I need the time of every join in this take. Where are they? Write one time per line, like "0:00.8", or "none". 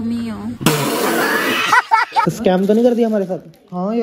0:02.2